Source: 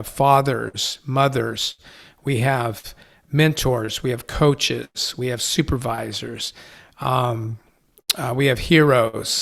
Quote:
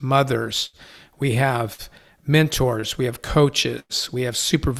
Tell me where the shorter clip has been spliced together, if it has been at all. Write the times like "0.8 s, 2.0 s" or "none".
none